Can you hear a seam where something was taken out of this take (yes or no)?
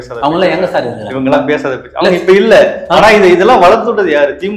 no